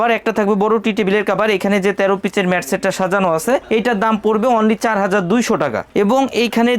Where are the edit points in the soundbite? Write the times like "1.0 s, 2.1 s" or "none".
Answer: none